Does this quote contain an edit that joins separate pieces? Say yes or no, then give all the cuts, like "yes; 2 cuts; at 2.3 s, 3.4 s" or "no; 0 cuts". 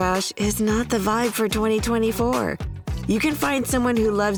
no; 0 cuts